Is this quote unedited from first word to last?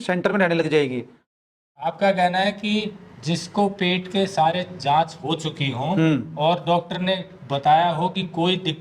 no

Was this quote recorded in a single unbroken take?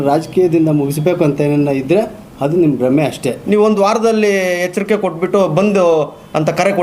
no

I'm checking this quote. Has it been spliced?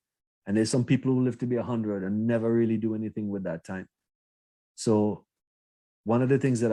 no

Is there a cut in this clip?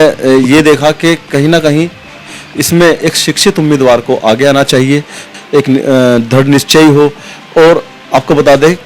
no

